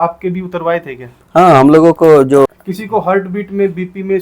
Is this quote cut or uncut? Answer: cut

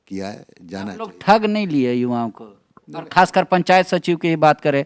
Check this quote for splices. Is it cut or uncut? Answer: uncut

